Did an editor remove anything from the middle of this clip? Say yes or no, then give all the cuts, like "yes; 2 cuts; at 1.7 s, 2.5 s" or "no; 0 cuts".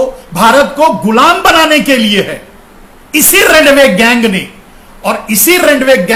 no; 0 cuts